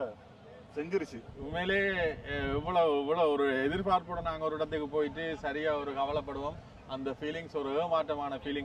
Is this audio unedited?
yes; 0 cuts

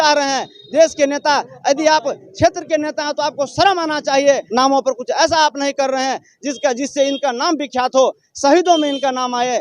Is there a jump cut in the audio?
yes; 1 cut; at 4.4 s

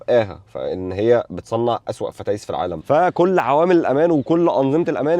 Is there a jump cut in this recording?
yes; 1 cut; at 2.8 s

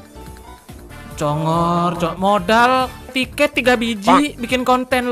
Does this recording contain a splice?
no; 0 cuts

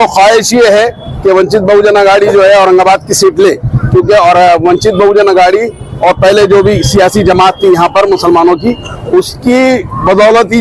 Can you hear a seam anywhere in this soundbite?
no; 0 cuts

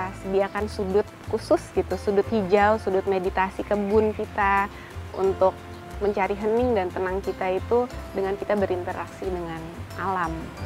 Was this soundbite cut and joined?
no; 0 cuts

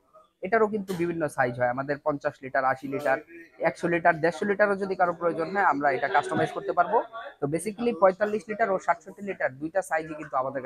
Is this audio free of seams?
yes; 0 cuts

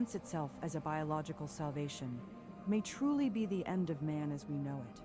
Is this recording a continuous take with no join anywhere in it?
yes; 0 cuts

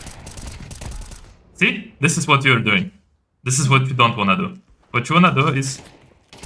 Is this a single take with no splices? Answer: yes; 0 cuts

